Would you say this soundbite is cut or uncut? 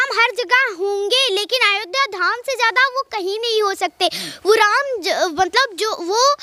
uncut